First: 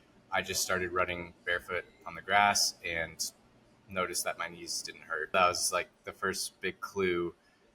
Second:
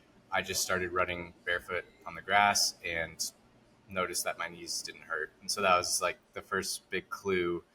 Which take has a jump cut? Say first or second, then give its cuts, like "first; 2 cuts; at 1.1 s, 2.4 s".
first; 1 cut; at 5.3 s